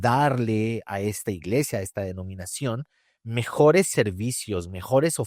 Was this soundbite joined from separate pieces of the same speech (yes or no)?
no